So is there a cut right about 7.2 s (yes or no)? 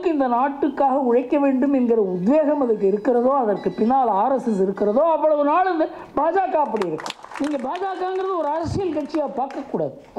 yes